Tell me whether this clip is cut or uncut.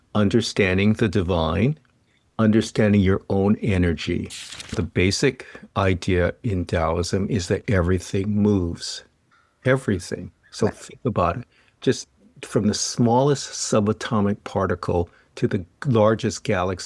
cut